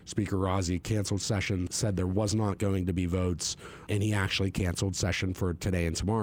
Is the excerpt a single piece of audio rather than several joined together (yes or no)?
no